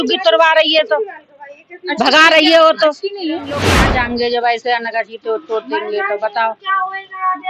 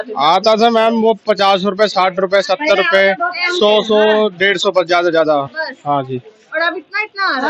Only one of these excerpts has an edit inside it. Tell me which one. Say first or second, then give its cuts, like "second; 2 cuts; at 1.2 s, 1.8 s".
first; 1 cut; at 3.8 s